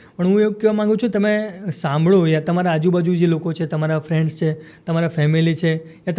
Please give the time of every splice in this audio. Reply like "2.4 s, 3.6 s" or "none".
none